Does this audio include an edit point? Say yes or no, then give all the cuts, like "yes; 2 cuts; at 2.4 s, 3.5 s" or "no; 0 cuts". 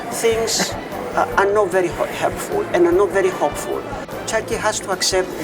yes; 1 cut; at 4.0 s